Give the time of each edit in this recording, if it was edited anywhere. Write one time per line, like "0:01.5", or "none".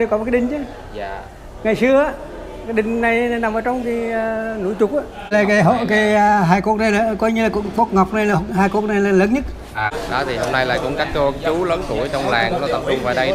0:05.3
0:09.9